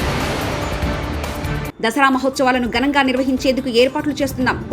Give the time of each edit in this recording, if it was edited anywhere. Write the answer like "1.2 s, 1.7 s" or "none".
1.5 s